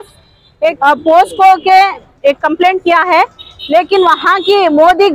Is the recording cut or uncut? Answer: cut